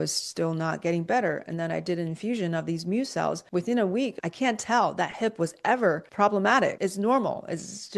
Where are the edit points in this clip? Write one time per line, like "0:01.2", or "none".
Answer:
0:03.4
0:04.1
0:06.1
0:06.8